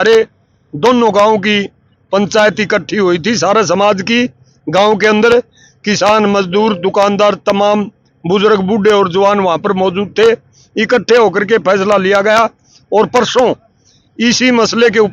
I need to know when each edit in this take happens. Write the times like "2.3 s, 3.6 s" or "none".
none